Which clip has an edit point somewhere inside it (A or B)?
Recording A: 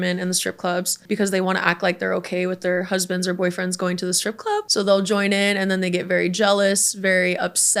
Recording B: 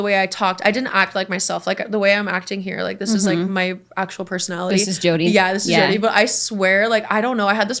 A